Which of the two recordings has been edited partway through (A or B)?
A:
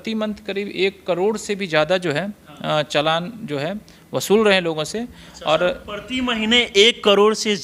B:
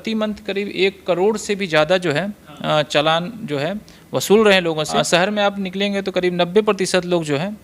B